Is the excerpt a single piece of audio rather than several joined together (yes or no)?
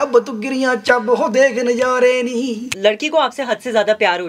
no